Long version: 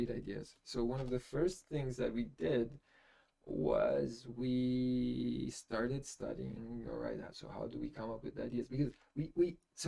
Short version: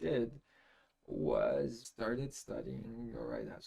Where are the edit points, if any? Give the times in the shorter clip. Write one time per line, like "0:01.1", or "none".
0:01.8